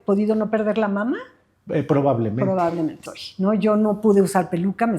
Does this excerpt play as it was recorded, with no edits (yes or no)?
no